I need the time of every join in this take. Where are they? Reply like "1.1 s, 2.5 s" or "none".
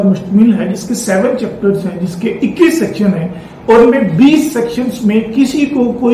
none